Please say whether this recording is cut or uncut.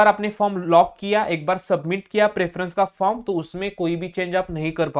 uncut